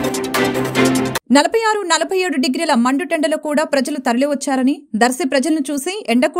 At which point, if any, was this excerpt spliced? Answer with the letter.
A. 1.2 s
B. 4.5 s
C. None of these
C